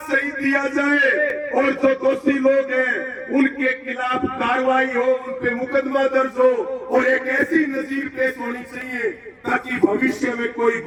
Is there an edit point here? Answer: no; 0 cuts

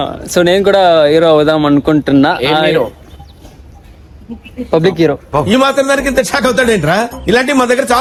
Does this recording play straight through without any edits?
yes; 0 cuts

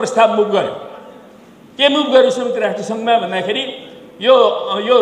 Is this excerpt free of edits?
yes; 0 cuts

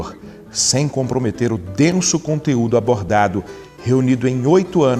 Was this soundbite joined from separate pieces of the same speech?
yes; 1 cut; at 1.6 s

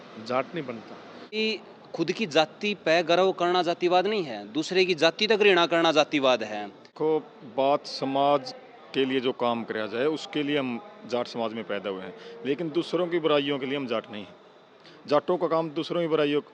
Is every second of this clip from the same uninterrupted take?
no; 2 cuts; at 1.4 s, 6.9 s

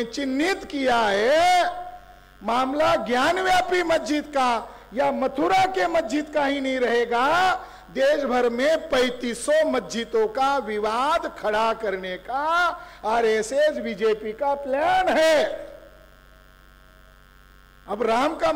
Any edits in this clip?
yes; 1 cut; at 17.4 s

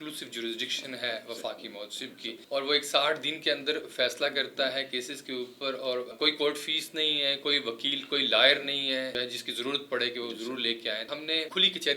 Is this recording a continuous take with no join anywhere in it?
no; 4 cuts; at 2.4 s, 6.1 s, 9.1 s, 11.0 s

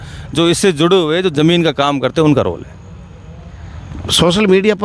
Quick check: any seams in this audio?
no; 0 cuts

